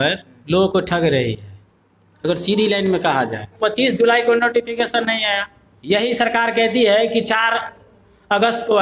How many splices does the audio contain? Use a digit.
1